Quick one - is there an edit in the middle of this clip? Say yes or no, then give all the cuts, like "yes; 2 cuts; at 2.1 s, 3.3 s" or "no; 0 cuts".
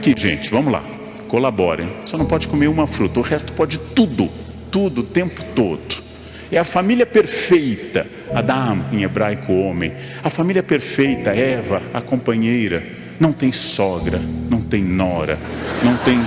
no; 0 cuts